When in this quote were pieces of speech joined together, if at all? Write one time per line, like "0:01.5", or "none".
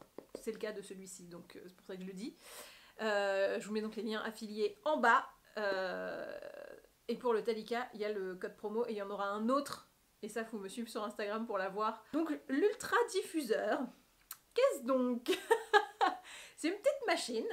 0:12.0